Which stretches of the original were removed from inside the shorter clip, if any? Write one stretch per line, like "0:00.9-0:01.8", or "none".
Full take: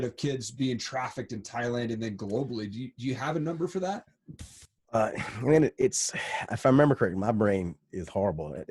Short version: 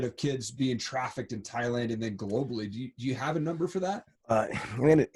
0:04.1-0:04.8